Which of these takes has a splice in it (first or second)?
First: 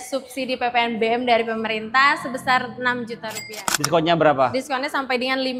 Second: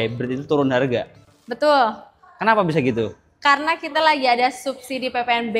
first